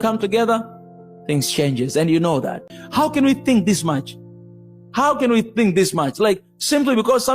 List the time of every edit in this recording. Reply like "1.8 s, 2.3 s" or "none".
2.7 s